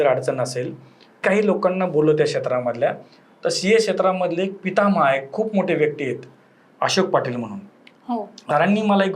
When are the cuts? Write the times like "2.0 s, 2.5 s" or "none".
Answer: 1.2 s, 8.3 s